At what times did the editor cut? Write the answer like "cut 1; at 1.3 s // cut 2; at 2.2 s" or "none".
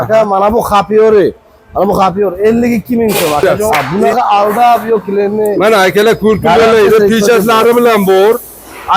cut 1; at 3.6 s

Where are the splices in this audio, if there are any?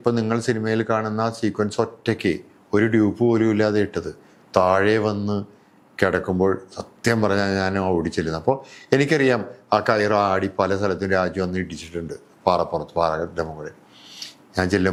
none

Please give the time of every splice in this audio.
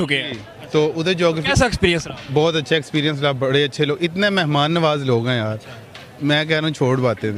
none

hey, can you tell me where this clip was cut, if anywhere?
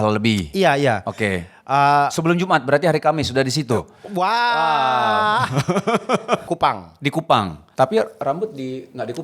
cut 1; at 6.4 s // cut 2; at 7.6 s

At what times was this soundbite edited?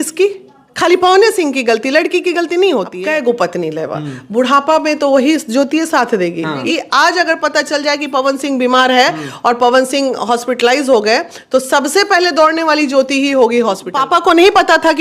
cut 1; at 3.0 s // cut 2; at 6.7 s // cut 3; at 14.0 s

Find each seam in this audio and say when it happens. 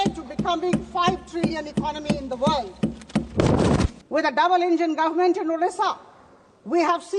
cut 1; at 4.0 s

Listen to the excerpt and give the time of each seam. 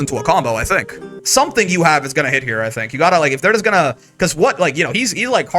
cut 1; at 1.1 s

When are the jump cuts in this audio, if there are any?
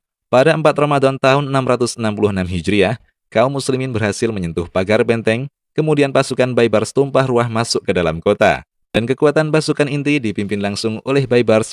cut 1; at 8.8 s

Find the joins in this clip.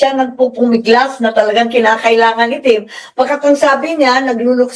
none

